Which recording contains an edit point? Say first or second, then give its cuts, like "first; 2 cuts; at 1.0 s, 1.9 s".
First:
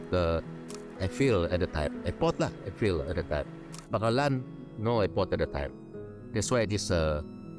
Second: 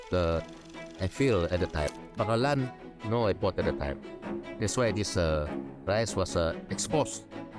second; 1 cut; at 2.0 s